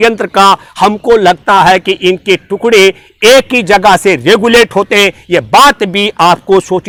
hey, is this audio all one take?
yes; 0 cuts

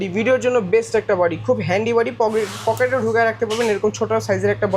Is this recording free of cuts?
yes; 0 cuts

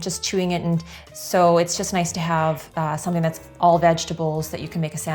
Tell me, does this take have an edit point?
no; 0 cuts

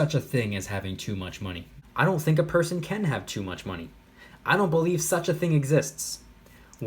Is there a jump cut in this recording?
yes; 1 cut; at 1.7 s

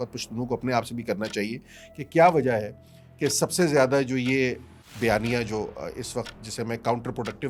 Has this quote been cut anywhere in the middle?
no; 0 cuts

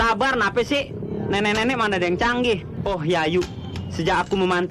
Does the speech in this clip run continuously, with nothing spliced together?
no; 1 cut; at 2.7 s

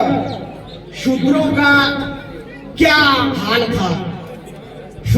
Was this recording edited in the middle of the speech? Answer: no; 0 cuts

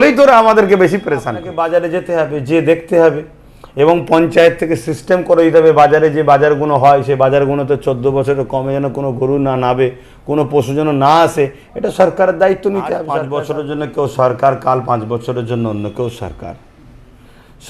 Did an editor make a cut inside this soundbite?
yes; 2 cuts; at 1.5 s, 13.2 s

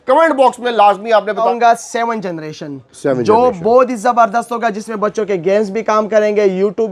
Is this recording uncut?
no; 1 cut; at 1.5 s

